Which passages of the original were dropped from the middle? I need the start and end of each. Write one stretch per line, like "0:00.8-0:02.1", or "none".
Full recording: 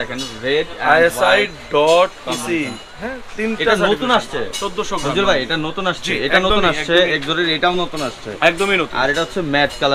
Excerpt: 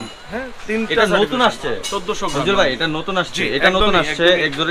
none